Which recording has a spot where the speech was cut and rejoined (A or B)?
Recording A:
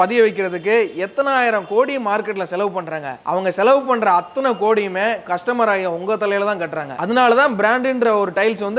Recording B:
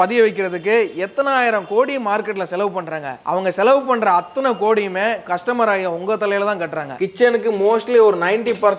B